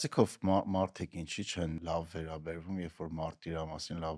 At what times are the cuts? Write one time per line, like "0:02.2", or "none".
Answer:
0:01.8